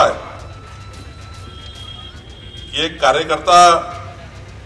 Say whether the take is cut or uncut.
uncut